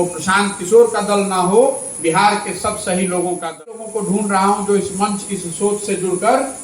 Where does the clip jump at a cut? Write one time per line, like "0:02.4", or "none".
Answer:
0:03.9

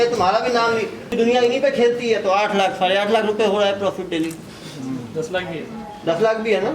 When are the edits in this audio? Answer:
0:01.1

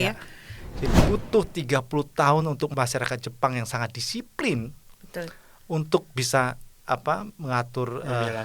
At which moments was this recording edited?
0:00.8
0:02.7

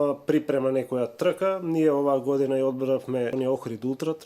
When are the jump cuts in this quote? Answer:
0:03.3

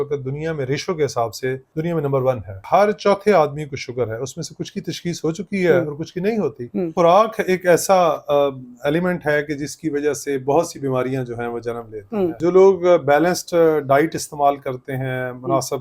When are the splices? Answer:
0:01.7
0:02.6
0:06.9
0:12.4

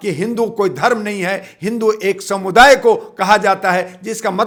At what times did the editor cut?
none

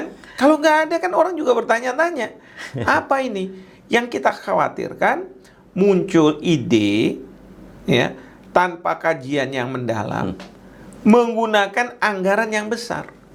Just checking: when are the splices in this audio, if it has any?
none

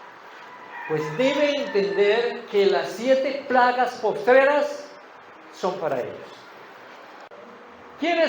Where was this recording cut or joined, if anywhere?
0:07.3

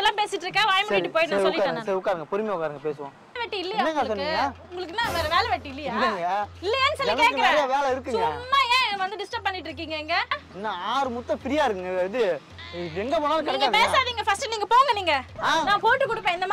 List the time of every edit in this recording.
0:03.4
0:10.5
0:15.3

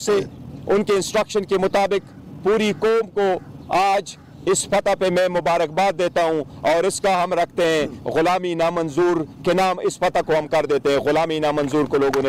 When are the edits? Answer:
none

